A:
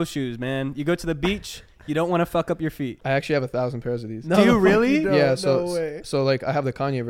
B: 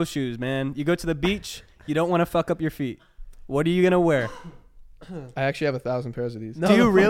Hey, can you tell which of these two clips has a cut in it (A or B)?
A